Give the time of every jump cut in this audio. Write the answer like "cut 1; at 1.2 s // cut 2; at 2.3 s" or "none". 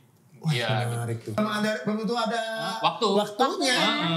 cut 1; at 1.4 s